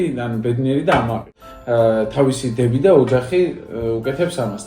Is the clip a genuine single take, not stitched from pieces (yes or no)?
no